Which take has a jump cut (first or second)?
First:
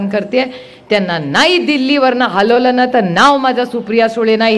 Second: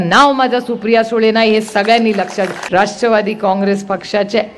second